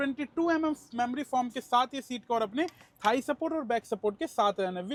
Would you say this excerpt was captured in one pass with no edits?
yes; 0 cuts

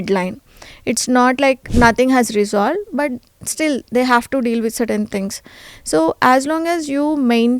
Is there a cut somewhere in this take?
yes; 1 cut; at 1.6 s

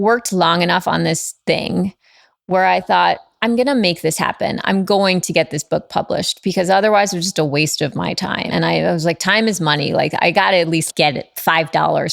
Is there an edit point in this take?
yes; 2 cuts; at 8.5 s, 10.9 s

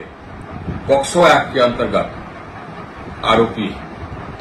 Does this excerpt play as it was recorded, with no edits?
yes; 0 cuts

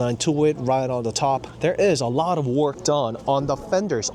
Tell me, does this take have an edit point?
no; 0 cuts

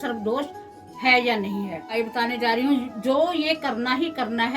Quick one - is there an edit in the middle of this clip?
yes; 1 cut; at 1.9 s

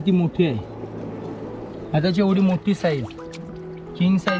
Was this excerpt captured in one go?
yes; 0 cuts

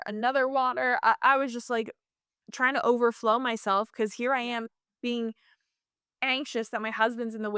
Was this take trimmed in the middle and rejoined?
no; 0 cuts

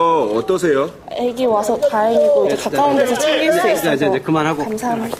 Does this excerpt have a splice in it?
no; 0 cuts

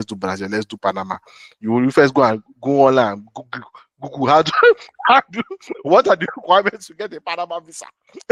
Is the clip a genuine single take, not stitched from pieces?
yes; 0 cuts

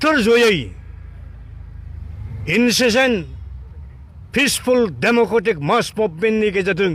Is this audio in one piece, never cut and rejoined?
yes; 0 cuts

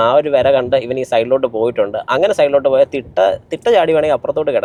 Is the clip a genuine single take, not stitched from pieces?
yes; 0 cuts

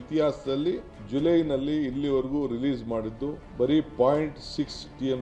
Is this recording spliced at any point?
yes; 2 cuts; at 0.9 s, 3.4 s

